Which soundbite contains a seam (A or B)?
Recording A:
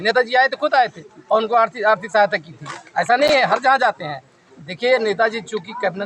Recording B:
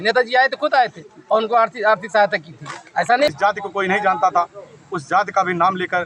B